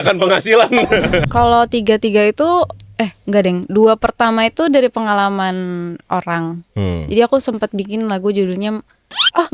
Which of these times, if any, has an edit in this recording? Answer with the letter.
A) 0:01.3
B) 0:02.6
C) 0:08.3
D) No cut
A